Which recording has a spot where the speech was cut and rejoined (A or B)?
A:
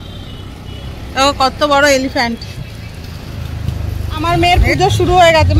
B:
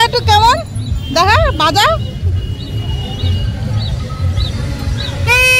A